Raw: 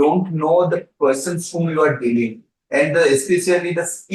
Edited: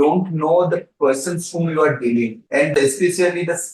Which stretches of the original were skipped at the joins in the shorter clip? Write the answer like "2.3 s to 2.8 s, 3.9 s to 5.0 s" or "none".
2.8 s to 3.0 s

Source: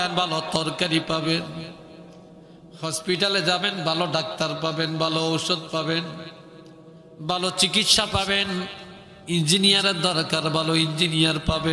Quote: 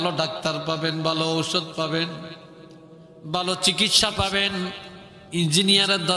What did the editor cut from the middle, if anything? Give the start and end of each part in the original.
none

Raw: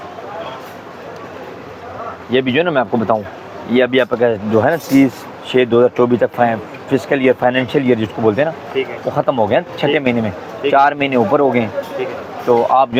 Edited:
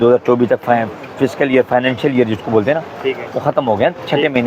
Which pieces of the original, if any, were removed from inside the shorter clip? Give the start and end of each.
none

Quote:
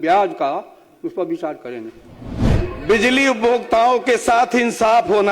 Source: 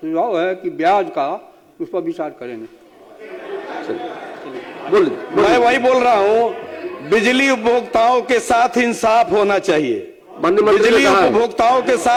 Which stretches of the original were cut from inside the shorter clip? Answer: 3.2 s to 6.7 s

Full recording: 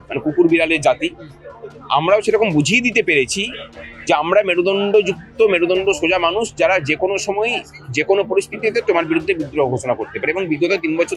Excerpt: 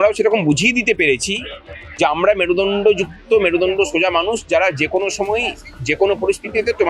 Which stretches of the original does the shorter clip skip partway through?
none

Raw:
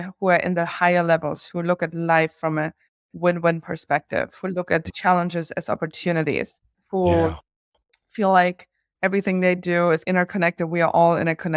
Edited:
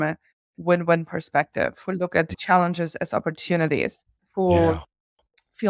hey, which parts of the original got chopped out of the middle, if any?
none

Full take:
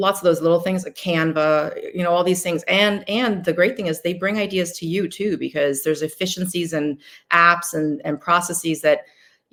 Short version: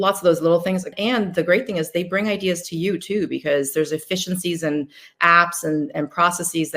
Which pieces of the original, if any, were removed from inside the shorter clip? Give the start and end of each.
0.9 s to 3.0 s

